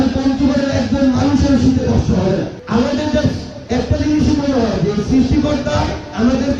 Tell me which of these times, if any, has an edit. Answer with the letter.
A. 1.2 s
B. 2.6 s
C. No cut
B